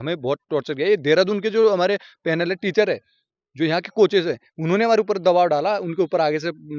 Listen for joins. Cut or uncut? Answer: uncut